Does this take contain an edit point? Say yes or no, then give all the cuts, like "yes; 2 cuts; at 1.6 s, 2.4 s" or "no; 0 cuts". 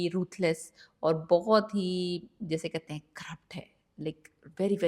no; 0 cuts